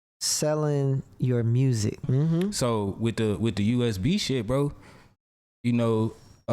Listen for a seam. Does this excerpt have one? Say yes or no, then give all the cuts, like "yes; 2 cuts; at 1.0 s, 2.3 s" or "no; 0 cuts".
yes; 1 cut; at 2.1 s